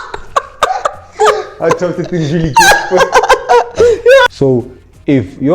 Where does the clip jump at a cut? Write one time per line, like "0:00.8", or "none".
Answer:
0:04.3

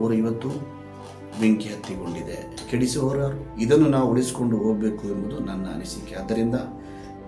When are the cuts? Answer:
0:03.4

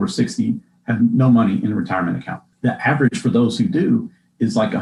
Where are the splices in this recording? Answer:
none

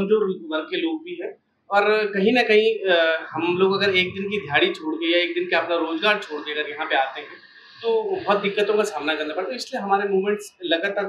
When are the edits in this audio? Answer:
none

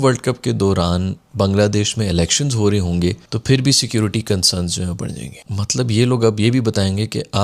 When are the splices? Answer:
none

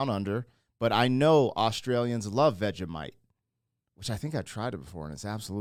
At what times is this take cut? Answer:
none

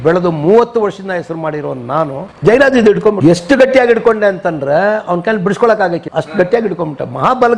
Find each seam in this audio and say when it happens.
0:02.3
0:03.2
0:06.0

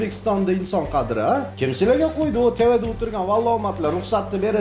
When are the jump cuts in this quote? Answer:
0:01.5

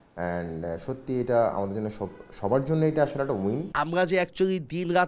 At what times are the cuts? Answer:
0:03.7

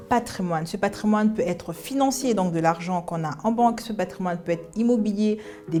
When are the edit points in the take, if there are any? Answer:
none

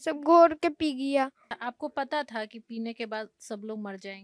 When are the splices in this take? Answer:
0:01.5

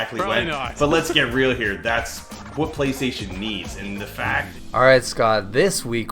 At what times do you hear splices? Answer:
0:04.5

